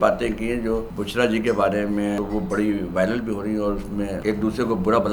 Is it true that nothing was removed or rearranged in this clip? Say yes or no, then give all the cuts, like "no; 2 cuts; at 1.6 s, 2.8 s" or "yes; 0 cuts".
no; 3 cuts; at 1.0 s, 2.2 s, 4.2 s